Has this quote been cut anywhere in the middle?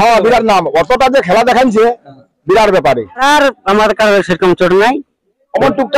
yes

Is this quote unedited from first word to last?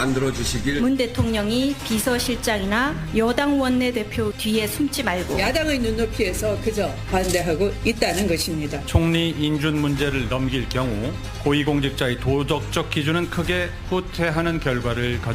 yes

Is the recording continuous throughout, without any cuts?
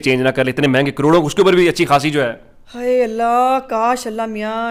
yes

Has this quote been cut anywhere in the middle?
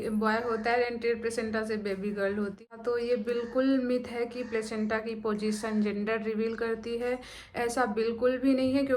yes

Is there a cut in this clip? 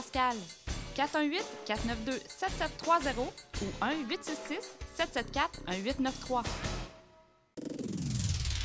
yes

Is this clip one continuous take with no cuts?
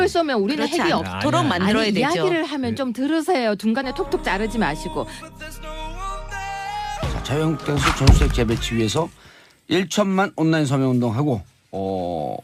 no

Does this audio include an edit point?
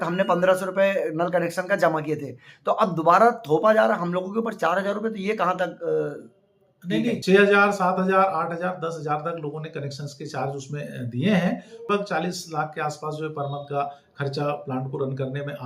yes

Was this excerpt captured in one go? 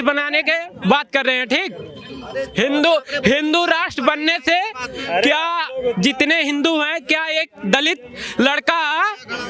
yes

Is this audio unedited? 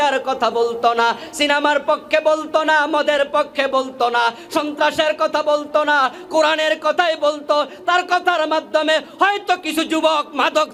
yes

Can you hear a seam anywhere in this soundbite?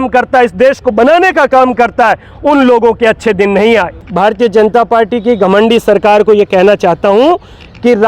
yes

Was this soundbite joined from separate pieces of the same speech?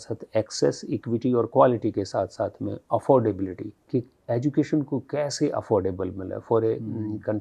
no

